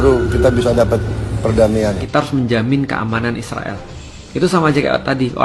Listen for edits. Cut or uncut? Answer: cut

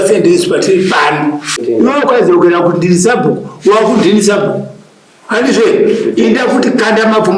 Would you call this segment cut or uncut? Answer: cut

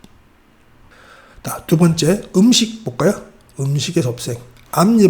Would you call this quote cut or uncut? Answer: uncut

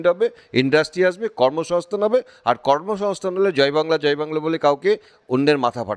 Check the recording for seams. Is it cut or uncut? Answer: uncut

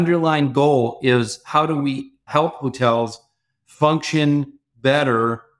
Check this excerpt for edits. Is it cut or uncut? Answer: cut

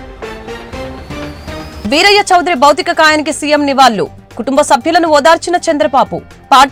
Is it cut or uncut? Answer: uncut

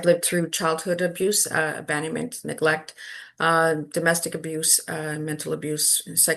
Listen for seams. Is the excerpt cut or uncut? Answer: uncut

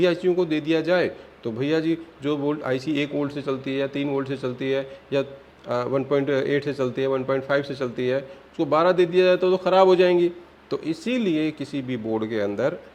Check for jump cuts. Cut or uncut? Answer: uncut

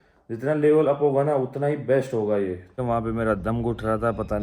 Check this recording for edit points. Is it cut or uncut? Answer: cut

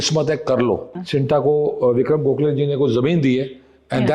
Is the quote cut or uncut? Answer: cut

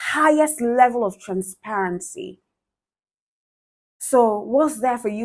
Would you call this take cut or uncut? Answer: uncut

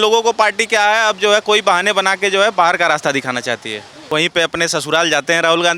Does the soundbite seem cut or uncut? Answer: cut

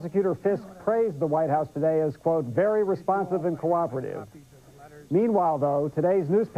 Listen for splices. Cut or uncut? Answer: cut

